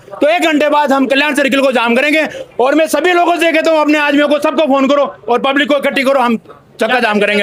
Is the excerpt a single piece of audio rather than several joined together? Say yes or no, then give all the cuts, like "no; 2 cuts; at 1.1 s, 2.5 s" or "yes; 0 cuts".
yes; 0 cuts